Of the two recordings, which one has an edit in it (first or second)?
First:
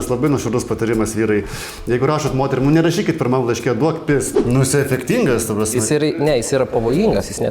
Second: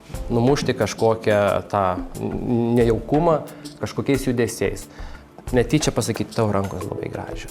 first